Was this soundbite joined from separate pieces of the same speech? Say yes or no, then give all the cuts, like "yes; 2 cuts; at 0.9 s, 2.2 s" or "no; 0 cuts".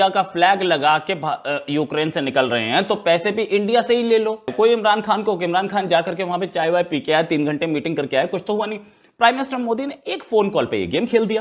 yes; 1 cut; at 4.5 s